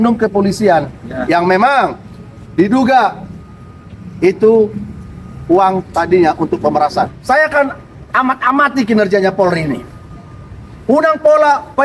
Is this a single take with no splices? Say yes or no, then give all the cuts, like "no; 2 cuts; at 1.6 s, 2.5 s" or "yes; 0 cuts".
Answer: no; 1 cut; at 7.2 s